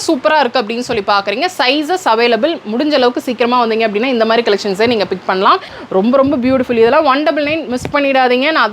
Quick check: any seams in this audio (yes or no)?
yes